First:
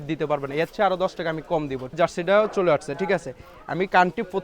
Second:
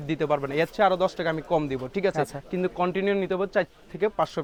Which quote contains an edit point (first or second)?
first